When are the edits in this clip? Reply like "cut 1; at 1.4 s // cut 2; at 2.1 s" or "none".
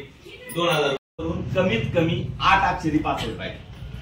cut 1; at 1.1 s

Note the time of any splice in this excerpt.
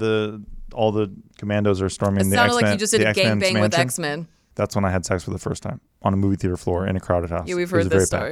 cut 1; at 1.3 s // cut 2; at 4.4 s

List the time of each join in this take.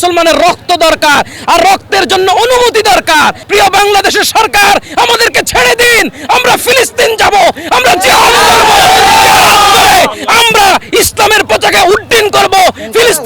cut 1; at 3.4 s

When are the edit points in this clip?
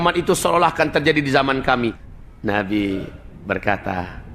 cut 1; at 2.0 s

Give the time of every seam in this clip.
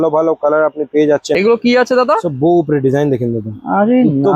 cut 1; at 1.4 s

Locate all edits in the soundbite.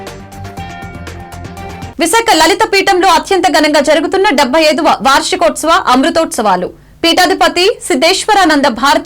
cut 1; at 1.3 s

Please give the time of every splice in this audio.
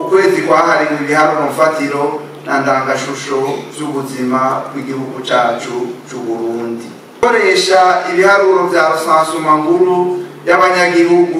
cut 1; at 7.2 s

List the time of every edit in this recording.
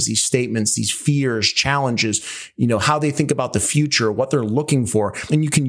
none

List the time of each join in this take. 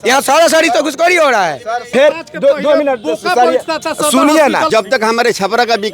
cut 1; at 1.9 s // cut 2; at 4.7 s

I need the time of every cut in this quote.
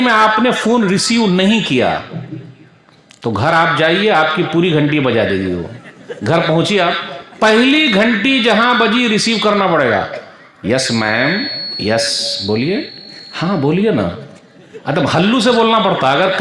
none

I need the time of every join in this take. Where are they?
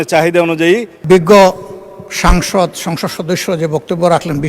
cut 1; at 0.9 s

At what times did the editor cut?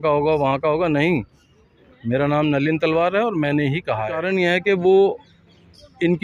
cut 1; at 4.2 s

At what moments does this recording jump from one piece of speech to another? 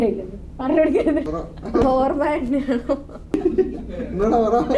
cut 1; at 1.2 s // cut 2; at 3.3 s

